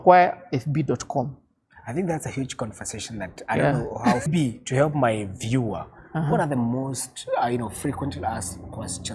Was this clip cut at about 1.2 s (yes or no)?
no